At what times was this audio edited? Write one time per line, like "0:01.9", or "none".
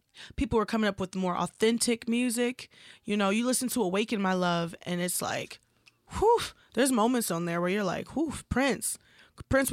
none